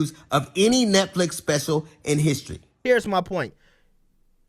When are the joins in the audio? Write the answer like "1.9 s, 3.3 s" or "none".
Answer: 2.7 s

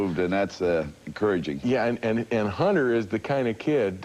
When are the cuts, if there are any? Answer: 2.5 s

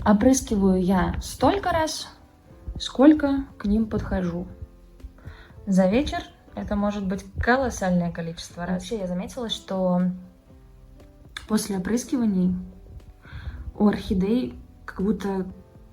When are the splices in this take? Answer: 8.7 s

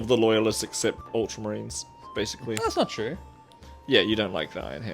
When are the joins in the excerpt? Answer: 1.0 s

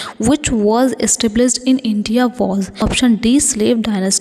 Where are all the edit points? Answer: 2.8 s

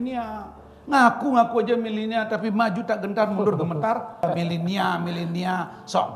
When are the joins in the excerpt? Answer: 4.2 s

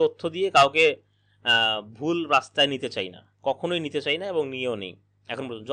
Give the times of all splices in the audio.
none

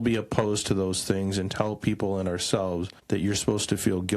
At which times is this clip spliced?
2.9 s

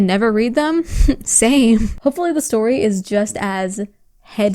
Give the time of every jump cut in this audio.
2.0 s

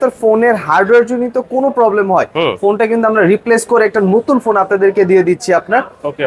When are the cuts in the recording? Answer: none

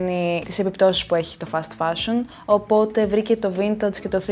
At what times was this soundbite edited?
2.4 s

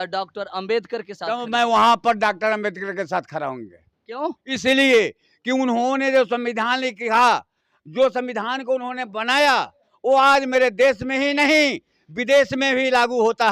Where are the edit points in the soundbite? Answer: none

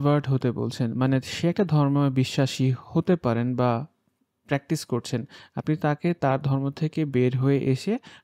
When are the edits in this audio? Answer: none

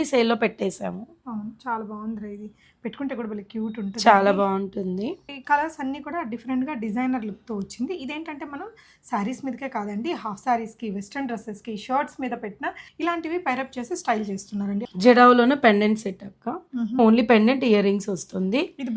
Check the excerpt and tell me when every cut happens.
5.3 s, 12.8 s, 14.9 s, 17.0 s

